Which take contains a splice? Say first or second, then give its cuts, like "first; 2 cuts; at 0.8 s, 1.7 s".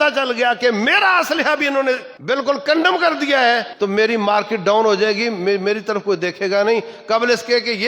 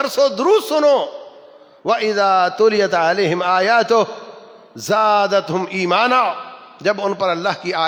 first; 2 cuts; at 2.1 s, 3.7 s